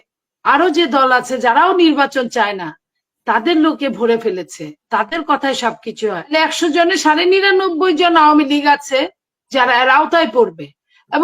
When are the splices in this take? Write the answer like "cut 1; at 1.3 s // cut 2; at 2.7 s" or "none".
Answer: cut 1; at 6.3 s

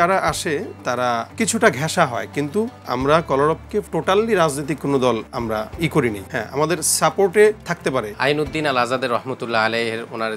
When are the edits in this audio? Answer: cut 1; at 1.3 s // cut 2; at 2.8 s // cut 3; at 3.9 s // cut 4; at 5.5 s // cut 5; at 6.2 s // cut 6; at 7.8 s

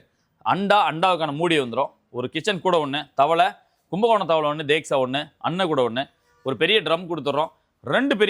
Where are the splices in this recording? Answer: none

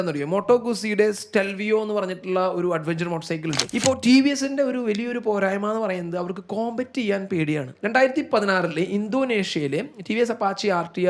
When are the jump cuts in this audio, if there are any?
cut 1; at 3.6 s // cut 2; at 7.7 s

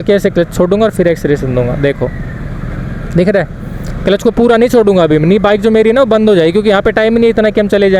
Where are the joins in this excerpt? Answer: none

